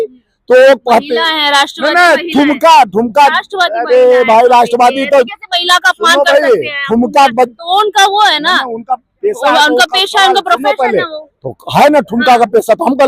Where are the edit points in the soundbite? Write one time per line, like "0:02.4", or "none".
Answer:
none